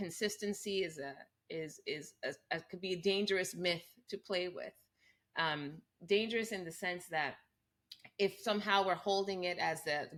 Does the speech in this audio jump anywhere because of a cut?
no; 0 cuts

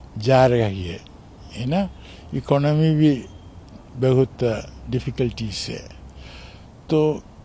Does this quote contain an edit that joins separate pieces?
no; 0 cuts

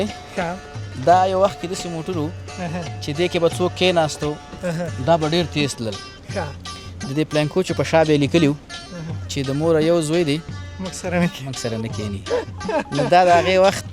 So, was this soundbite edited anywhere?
no; 0 cuts

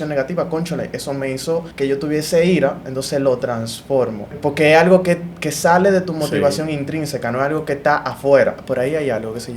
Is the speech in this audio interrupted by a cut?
yes; 3 cuts; at 1.7 s, 4.4 s, 8.6 s

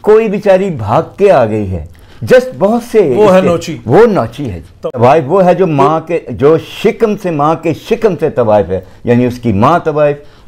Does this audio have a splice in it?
yes; 1 cut; at 4.8 s

